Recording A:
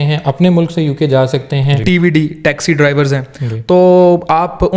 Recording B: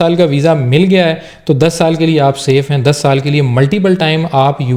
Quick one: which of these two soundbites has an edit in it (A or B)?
A